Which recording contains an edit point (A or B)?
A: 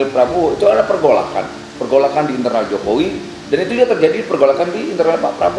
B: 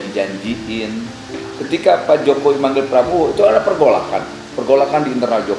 B